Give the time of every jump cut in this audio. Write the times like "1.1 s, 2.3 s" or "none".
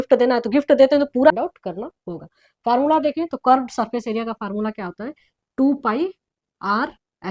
1.3 s